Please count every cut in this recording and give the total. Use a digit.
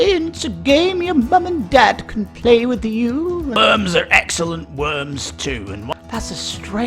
2